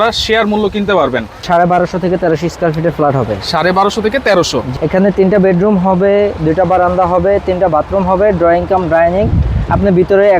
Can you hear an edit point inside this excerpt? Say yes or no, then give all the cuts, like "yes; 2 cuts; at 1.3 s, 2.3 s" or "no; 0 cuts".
yes; 2 cuts; at 1.4 s, 4.6 s